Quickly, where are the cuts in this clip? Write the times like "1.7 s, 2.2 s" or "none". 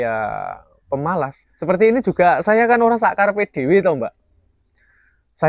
1.5 s